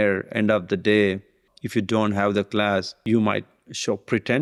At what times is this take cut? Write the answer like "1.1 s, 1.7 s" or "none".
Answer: none